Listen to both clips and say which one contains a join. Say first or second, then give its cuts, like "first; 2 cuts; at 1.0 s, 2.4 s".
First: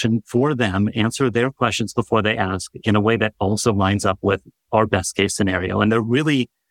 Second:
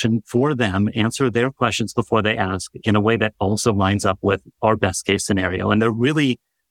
second; 1 cut; at 4.5 s